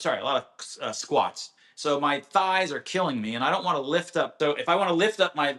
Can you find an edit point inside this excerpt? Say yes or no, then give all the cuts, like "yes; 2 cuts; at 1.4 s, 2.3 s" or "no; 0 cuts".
yes; 1 cut; at 4.3 s